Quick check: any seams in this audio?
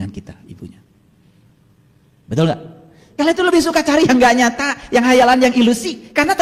no; 0 cuts

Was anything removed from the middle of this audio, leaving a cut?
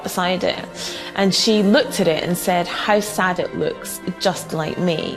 no; 0 cuts

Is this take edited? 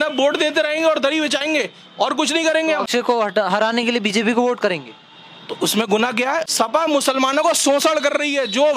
yes; 2 cuts; at 2.8 s, 6.5 s

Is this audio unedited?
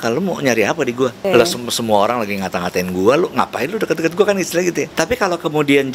no; 2 cuts; at 1.2 s, 4.9 s

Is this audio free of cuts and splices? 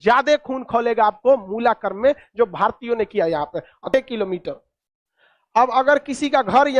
no; 1 cut; at 3.8 s

